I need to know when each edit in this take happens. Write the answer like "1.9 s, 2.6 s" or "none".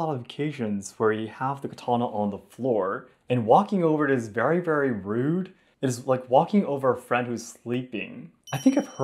none